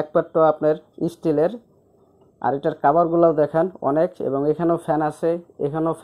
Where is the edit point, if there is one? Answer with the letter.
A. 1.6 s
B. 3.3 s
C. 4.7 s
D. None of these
D